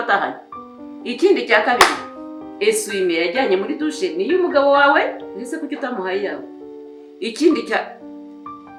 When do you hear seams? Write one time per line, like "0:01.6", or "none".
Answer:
none